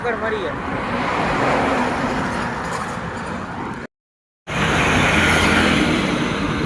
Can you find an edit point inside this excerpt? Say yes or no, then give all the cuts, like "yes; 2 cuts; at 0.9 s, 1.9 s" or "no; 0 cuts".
yes; 1 cut; at 4.5 s